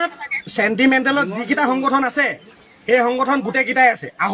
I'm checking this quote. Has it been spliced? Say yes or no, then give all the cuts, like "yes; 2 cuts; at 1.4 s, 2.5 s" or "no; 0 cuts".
no; 0 cuts